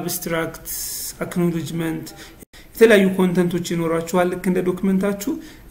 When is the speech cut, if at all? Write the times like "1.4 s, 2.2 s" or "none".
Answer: 2.3 s